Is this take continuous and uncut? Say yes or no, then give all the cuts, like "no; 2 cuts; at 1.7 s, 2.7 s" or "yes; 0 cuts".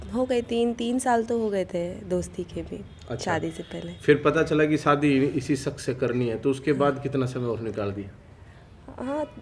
yes; 0 cuts